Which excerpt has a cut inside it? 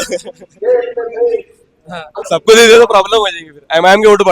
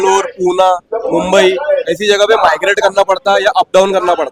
first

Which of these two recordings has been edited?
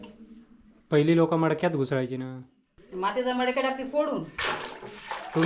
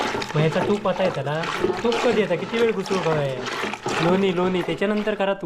first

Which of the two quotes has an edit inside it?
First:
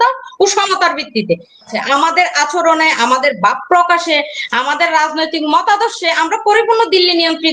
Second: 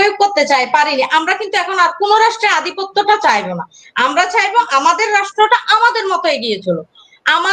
first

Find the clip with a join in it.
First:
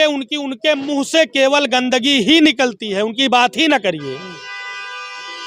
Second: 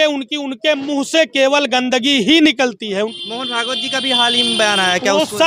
second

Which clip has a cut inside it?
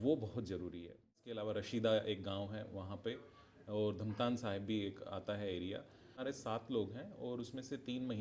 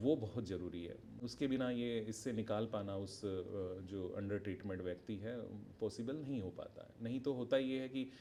first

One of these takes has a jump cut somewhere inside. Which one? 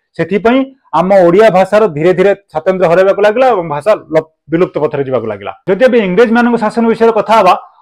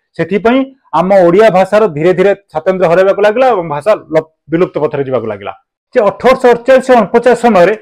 second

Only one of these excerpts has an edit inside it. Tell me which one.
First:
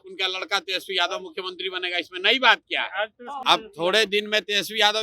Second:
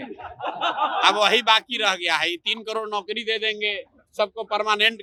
first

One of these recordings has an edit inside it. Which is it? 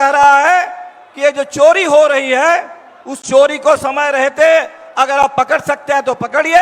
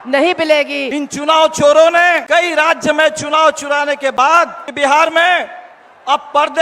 second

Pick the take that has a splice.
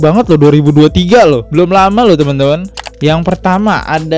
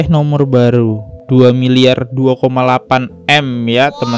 first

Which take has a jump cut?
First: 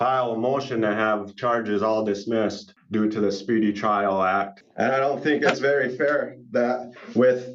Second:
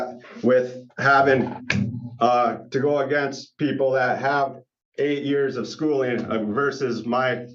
first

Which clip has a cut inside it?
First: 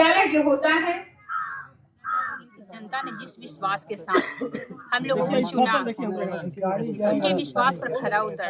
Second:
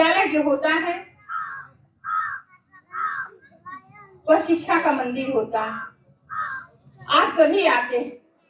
first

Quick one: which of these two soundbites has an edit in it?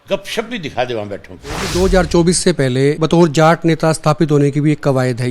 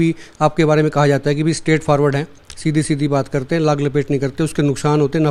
first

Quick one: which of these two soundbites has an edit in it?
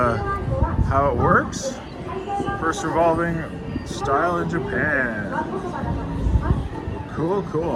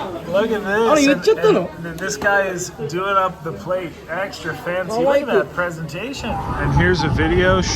second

